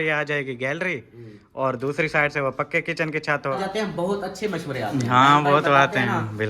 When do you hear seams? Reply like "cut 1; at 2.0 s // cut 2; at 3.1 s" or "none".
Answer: cut 1; at 3.6 s